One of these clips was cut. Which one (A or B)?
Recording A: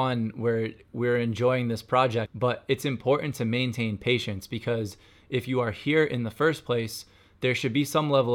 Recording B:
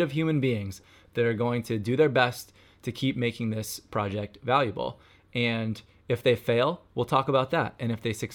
A